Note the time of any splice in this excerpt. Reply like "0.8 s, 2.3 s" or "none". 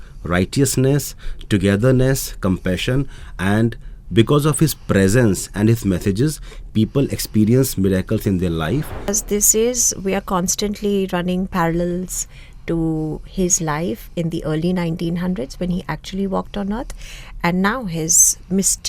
9.1 s